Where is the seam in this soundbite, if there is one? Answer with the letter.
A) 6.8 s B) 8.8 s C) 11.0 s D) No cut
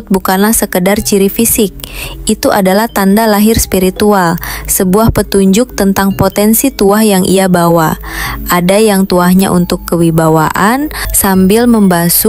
C